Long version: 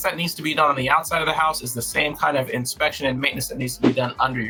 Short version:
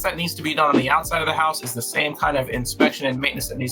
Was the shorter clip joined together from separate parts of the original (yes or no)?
no